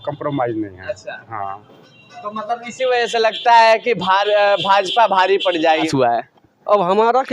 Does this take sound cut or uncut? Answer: cut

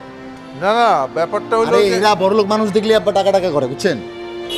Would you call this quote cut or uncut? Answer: uncut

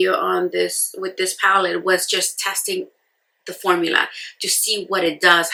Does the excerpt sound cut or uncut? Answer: uncut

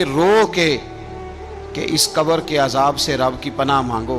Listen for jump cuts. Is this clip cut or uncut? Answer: uncut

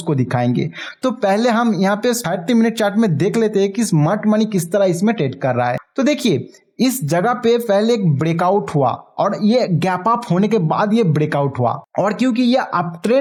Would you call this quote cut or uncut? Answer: uncut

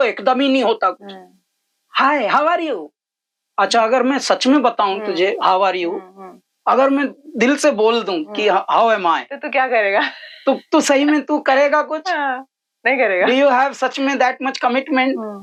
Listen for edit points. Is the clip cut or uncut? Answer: uncut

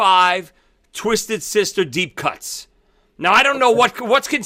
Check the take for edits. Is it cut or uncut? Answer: uncut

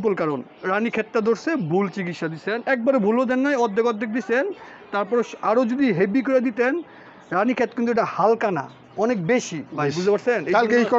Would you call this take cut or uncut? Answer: uncut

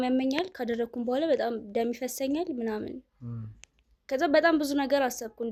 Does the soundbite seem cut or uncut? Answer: uncut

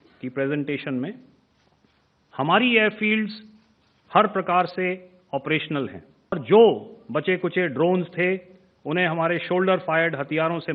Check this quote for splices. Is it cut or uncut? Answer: cut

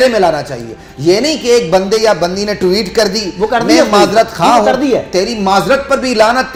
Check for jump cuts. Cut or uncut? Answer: uncut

